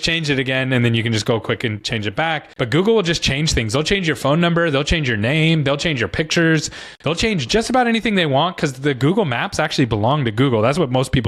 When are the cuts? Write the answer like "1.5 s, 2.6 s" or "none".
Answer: none